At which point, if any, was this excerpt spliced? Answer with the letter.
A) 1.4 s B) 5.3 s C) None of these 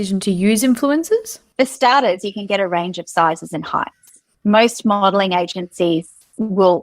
A